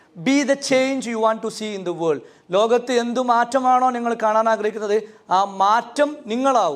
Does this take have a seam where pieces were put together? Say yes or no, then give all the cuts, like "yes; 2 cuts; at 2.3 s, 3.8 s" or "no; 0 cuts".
no; 0 cuts